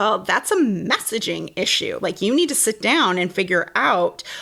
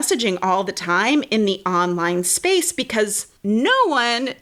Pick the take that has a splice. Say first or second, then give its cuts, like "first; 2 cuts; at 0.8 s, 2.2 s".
second; 1 cut; at 3.3 s